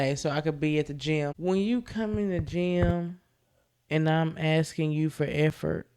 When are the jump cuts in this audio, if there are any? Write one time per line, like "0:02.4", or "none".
0:01.4